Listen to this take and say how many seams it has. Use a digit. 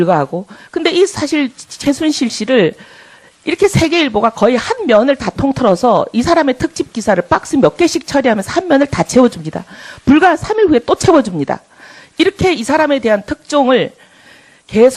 1